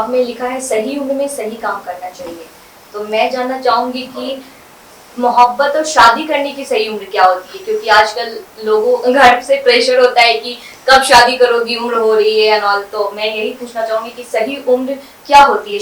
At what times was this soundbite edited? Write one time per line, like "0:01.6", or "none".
none